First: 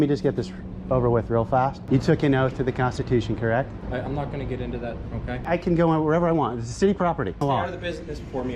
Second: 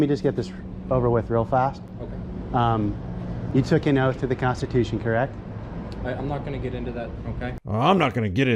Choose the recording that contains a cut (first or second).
first